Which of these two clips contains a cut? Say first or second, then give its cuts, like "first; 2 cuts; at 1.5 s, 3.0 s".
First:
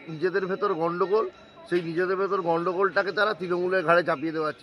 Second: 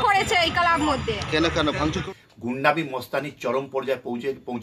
second; 1 cut; at 2.0 s